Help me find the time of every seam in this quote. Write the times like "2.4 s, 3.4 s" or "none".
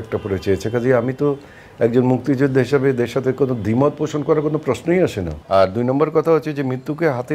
5.3 s